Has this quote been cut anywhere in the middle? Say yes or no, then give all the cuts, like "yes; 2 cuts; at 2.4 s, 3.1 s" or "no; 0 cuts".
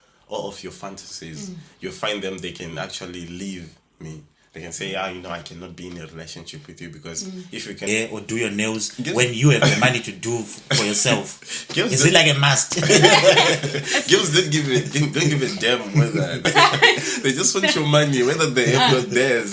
yes; 2 cuts; at 7.9 s, 16.5 s